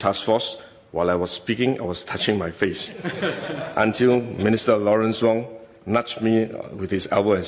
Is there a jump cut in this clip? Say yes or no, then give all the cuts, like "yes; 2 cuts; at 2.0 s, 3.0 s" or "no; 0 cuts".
no; 0 cuts